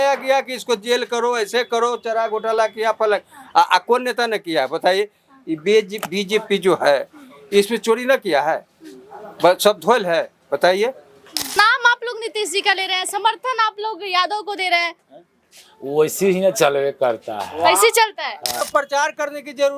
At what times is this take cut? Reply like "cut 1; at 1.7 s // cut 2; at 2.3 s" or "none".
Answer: cut 1; at 11.5 s // cut 2; at 18.6 s